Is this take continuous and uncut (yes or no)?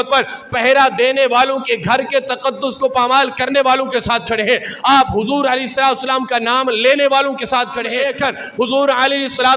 no